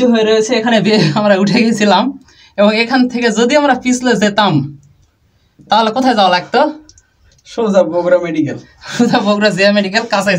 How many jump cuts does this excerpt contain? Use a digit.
0